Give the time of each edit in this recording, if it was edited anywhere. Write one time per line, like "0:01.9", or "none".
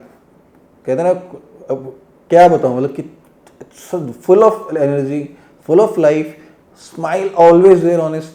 none